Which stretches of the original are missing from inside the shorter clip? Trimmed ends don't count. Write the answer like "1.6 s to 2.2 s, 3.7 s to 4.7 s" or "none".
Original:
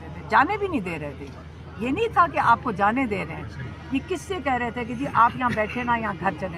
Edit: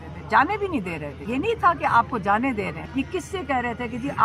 1.1 s to 1.6 s, 3.3 s to 3.8 s